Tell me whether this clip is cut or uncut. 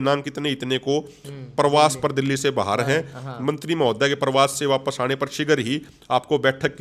uncut